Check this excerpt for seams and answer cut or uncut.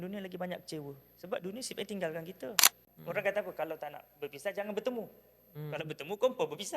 cut